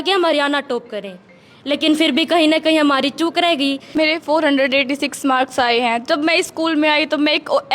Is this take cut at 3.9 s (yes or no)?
yes